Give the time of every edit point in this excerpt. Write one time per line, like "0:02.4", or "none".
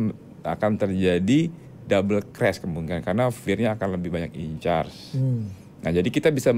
none